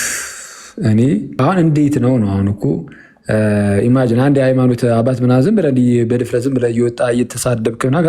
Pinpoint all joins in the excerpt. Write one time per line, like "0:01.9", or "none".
0:01.3